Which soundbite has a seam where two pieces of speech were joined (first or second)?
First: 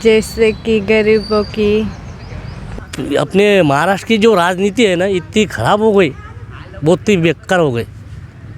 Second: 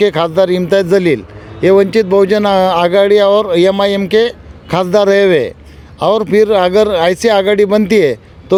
first